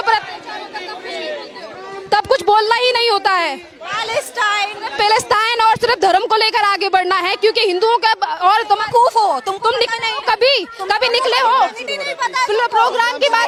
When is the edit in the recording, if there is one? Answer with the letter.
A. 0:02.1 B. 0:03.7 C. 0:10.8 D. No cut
D